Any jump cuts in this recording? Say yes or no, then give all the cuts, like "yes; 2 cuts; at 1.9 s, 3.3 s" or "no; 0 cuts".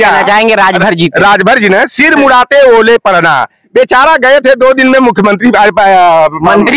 no; 0 cuts